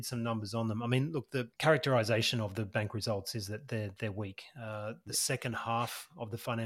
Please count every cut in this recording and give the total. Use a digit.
1